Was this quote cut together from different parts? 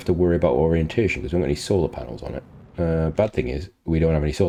no; 0 cuts

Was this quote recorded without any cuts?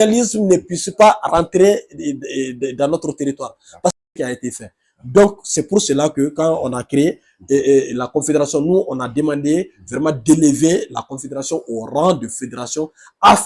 no; 1 cut; at 4.0 s

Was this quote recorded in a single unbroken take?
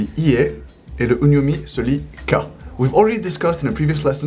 no; 1 cut; at 2.6 s

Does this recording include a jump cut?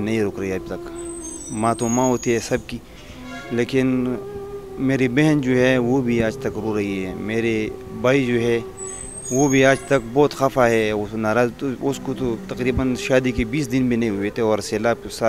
no; 0 cuts

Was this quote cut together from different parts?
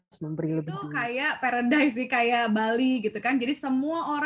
yes; 1 cut; at 0.9 s

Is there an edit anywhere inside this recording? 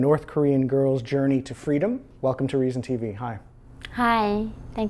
yes; 1 cut; at 1.4 s

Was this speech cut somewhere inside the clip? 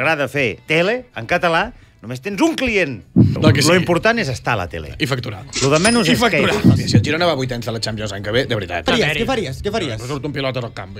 yes; 3 cuts; at 3.2 s, 6.8 s, 8.9 s

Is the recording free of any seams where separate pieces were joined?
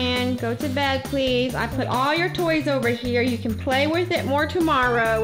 yes; 0 cuts

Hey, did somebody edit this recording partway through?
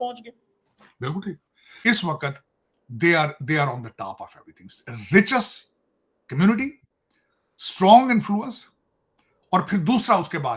yes; 1 cut; at 1.6 s

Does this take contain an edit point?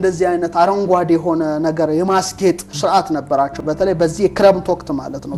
no; 0 cuts

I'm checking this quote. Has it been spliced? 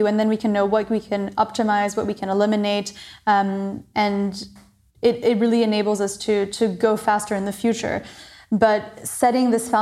no; 0 cuts

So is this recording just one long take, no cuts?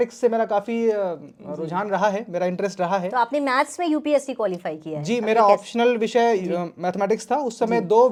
yes; 0 cuts

